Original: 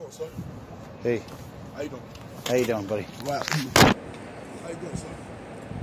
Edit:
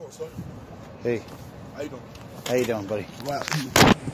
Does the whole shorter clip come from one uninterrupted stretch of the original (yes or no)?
yes